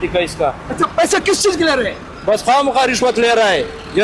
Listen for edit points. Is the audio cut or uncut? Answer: uncut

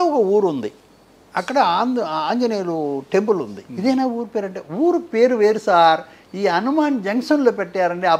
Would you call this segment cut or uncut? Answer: cut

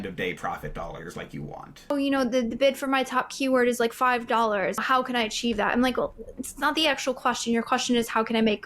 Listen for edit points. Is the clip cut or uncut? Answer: cut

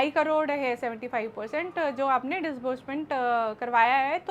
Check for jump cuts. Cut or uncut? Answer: uncut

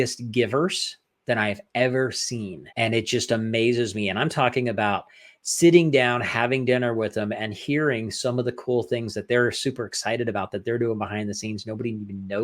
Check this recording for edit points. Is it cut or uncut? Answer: cut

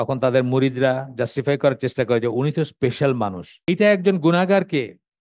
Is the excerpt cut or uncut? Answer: cut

